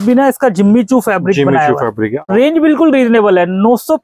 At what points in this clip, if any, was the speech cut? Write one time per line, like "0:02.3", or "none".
0:02.2